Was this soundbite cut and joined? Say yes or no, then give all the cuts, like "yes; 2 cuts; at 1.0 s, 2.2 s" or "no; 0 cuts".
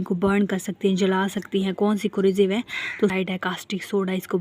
yes; 1 cut; at 3.1 s